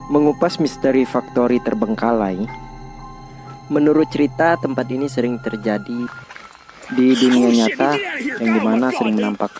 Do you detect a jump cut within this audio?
no; 0 cuts

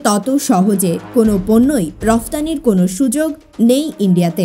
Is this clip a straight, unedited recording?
yes; 0 cuts

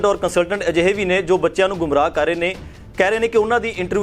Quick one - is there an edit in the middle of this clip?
no; 0 cuts

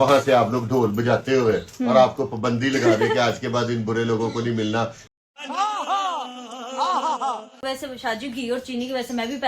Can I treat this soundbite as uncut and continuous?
no; 2 cuts; at 5.2 s, 7.6 s

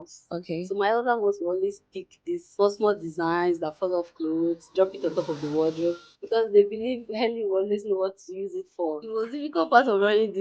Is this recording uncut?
no; 3 cuts; at 2.5 s, 6.1 s, 9.0 s

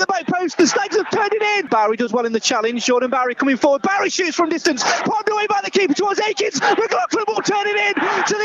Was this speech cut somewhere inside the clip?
yes; 1 cut; at 1.7 s

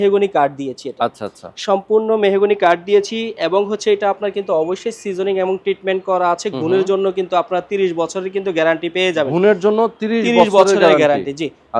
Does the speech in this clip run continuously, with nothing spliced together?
yes; 0 cuts

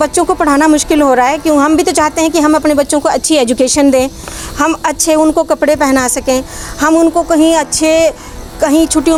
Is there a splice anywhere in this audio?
no; 0 cuts

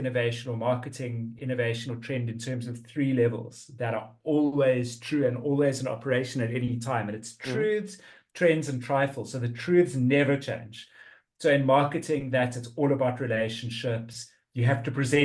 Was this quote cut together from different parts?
no; 0 cuts

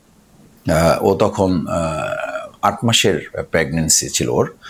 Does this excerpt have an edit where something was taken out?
no; 0 cuts

